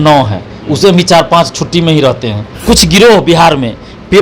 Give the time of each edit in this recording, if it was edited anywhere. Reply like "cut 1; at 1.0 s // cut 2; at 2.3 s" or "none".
cut 1; at 2.6 s